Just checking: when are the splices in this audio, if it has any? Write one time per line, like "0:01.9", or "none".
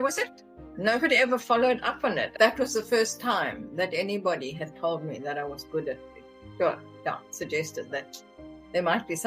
0:02.3